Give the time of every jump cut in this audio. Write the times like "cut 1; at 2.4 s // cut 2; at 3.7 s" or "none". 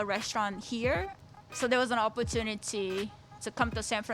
cut 1; at 1.1 s